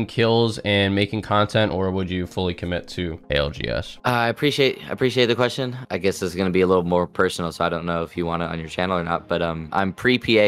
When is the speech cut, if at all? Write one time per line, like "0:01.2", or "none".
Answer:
none

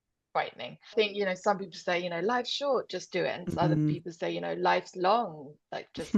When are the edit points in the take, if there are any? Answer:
0:00.9

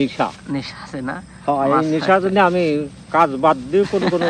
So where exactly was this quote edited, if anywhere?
none

